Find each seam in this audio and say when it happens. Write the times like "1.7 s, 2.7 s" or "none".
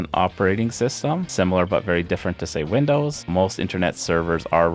1.3 s, 3.3 s